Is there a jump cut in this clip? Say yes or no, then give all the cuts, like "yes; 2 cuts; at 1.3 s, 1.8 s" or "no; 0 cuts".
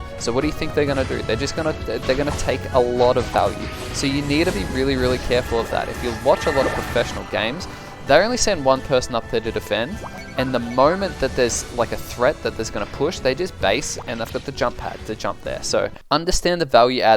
yes; 1 cut; at 16.0 s